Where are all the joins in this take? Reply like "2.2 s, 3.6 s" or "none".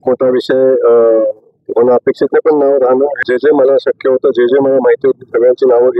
3.2 s